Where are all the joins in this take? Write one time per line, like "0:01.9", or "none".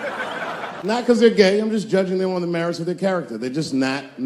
0:00.9